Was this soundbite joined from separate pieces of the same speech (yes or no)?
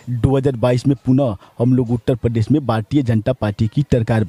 no